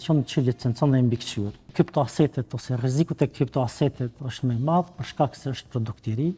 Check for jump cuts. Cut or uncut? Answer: cut